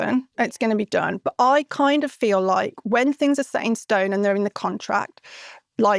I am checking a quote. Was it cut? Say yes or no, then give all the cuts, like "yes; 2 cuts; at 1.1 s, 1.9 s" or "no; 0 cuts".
no; 0 cuts